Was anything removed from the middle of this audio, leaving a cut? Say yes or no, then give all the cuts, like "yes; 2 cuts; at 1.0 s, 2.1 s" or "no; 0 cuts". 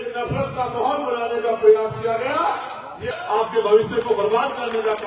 yes; 1 cut; at 3.1 s